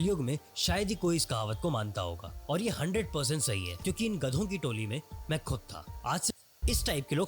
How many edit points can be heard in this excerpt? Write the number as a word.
one